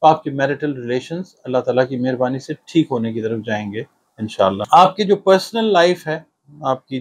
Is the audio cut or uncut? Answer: cut